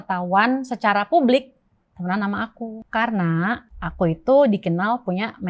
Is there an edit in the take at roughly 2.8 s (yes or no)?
yes